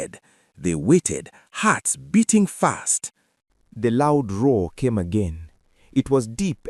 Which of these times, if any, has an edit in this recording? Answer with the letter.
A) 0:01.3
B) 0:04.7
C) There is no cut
C